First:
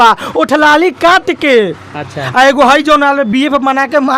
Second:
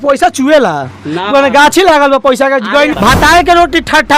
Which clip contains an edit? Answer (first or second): second